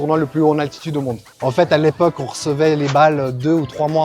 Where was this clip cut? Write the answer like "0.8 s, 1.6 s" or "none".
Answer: 1.3 s